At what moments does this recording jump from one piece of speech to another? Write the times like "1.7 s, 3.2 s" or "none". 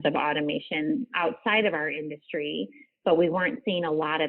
1.1 s